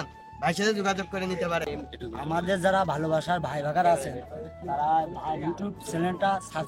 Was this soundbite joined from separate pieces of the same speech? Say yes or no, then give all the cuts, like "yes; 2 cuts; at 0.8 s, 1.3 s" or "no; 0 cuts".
yes; 1 cut; at 1.7 s